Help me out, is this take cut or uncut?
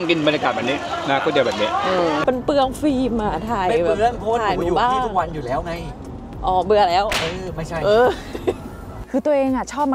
cut